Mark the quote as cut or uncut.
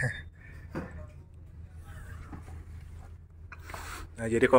uncut